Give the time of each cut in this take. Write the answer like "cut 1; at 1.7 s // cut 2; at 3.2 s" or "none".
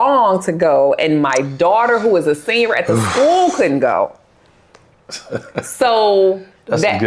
none